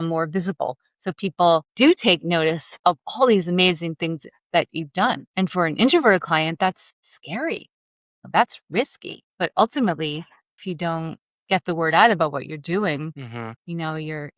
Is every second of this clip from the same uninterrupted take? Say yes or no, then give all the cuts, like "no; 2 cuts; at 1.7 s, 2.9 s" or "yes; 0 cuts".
yes; 0 cuts